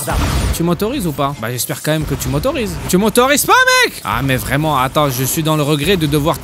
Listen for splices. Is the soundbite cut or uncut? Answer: cut